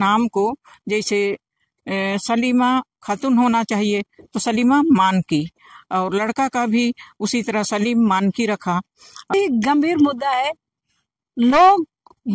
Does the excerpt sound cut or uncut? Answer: cut